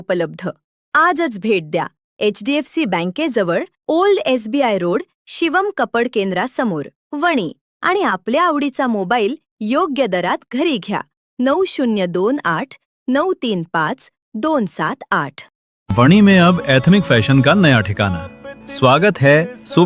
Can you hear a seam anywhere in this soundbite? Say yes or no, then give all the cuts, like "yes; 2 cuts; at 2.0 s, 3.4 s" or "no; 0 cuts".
no; 0 cuts